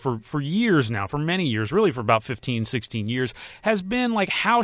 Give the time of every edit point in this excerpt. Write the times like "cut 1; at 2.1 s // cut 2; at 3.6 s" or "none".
none

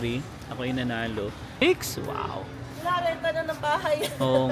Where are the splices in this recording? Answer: cut 1; at 1.6 s

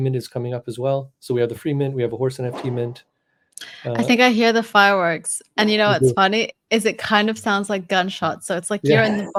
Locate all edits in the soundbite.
none

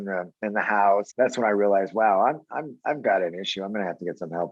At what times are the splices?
cut 1; at 1.1 s

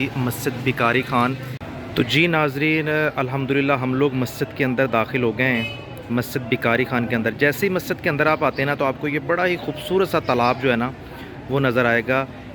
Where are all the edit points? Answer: cut 1; at 1.6 s

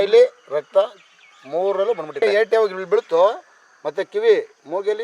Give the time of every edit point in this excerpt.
cut 1; at 2.2 s

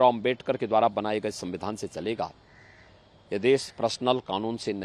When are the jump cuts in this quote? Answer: none

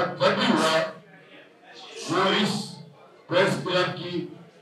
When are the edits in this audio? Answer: none

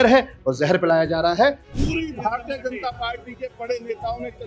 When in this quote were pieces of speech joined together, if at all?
cut 1; at 1.7 s

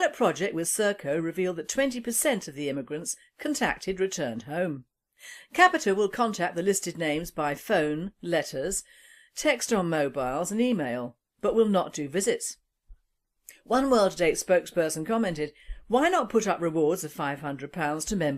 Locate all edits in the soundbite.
none

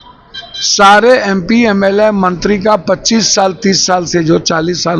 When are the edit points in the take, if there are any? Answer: none

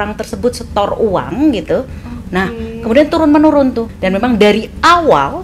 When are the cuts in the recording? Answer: cut 1; at 3.9 s

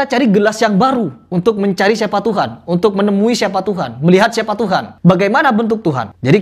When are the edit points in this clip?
none

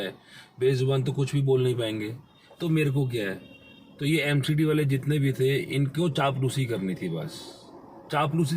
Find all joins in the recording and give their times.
none

